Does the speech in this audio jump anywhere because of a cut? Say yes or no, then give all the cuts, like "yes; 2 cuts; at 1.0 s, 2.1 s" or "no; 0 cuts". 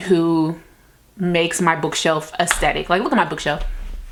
no; 0 cuts